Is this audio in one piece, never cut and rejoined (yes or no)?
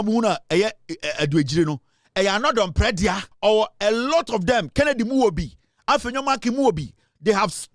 no